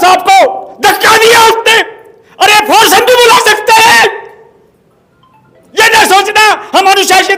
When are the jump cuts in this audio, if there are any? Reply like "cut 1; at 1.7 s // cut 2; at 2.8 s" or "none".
none